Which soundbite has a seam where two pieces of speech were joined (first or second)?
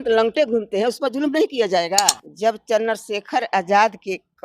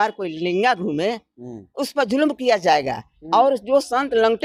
first